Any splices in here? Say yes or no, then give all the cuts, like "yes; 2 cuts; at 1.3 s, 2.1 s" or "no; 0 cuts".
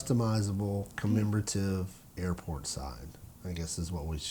yes; 1 cut; at 0.9 s